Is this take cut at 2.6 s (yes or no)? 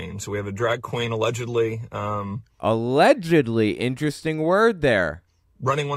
no